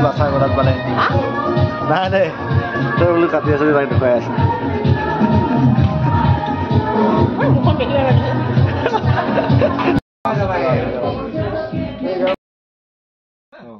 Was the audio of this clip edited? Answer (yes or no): no